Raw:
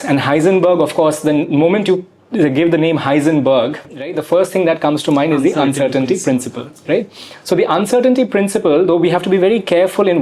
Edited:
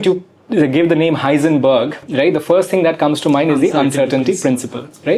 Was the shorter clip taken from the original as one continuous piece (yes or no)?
yes